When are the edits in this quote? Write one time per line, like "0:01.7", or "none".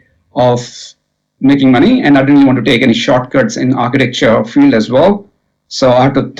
none